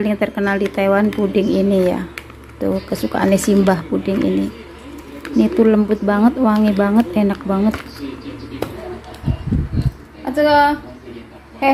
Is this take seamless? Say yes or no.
no